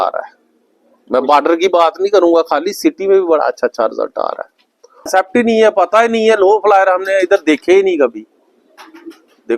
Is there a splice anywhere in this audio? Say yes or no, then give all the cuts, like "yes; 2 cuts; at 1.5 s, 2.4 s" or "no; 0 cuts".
yes; 1 cut; at 5.1 s